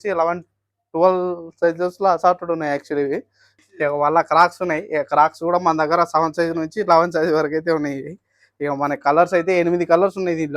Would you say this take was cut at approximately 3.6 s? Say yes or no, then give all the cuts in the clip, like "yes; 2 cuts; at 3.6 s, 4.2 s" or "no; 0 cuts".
yes; 1 cut; at 3.6 s